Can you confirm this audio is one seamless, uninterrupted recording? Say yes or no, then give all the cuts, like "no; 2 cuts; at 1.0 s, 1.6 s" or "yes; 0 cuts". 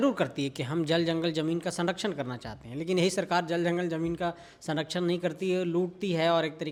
yes; 0 cuts